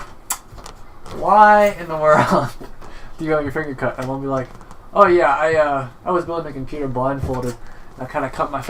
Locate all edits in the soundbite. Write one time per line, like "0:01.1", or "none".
none